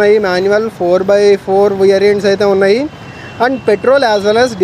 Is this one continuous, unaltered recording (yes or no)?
yes